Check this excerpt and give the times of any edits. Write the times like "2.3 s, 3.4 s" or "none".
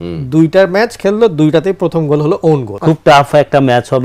2.7 s